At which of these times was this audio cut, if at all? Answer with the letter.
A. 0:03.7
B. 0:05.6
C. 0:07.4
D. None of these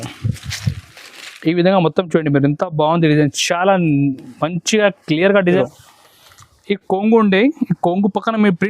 B